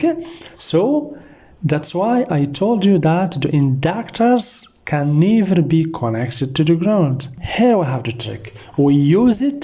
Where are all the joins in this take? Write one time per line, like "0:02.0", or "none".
0:07.3